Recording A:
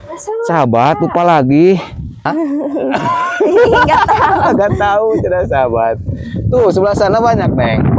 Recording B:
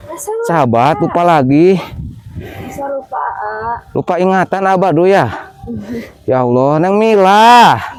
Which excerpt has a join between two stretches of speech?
A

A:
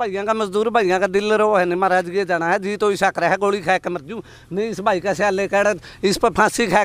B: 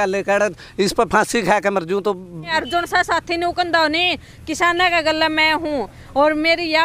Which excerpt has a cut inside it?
B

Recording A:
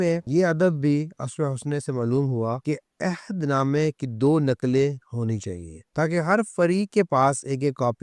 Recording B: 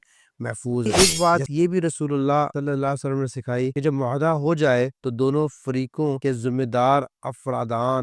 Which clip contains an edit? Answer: B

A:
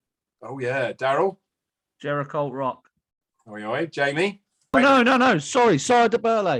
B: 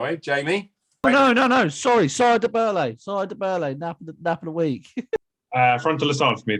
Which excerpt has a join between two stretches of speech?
B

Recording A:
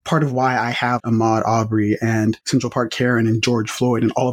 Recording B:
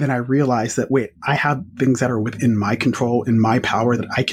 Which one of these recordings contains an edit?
A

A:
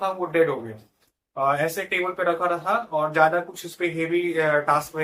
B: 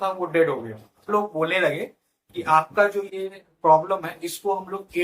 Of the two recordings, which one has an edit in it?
B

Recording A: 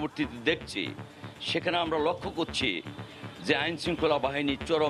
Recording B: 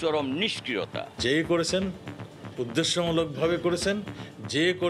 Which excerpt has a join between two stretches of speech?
B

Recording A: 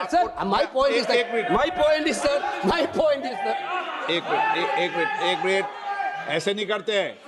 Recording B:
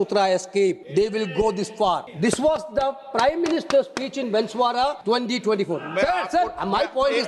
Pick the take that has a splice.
B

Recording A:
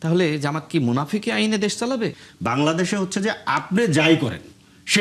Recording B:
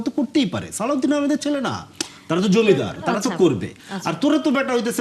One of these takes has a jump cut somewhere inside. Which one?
A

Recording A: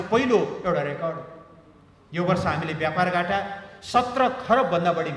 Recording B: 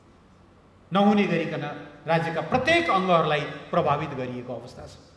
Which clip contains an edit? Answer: A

